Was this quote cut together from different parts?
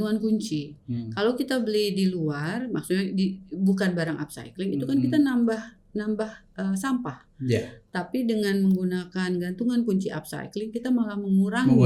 no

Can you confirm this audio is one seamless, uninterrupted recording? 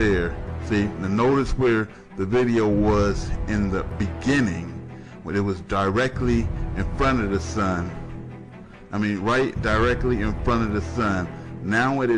no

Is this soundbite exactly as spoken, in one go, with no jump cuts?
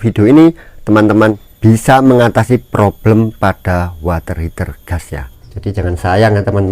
no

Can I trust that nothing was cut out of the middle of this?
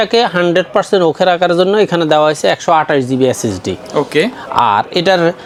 yes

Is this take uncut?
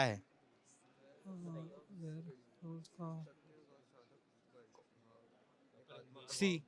no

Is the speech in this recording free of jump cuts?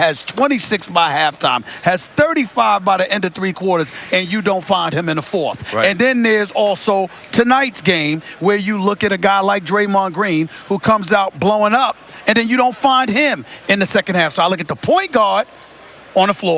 no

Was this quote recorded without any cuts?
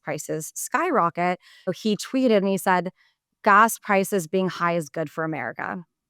no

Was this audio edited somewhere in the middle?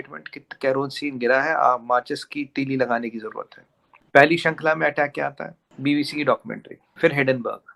no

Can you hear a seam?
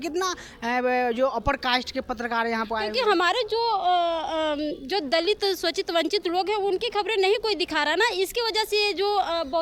no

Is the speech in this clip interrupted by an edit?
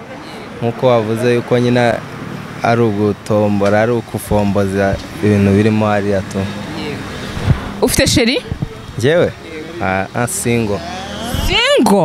no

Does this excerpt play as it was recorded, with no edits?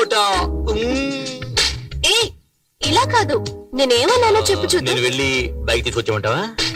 yes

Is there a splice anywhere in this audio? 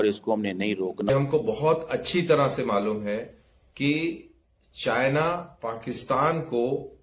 yes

